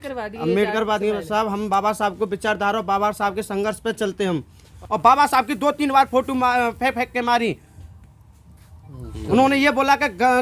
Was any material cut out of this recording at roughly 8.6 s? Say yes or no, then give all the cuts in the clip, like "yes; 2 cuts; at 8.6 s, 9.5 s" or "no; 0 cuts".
no; 1 cut; at 4.8 s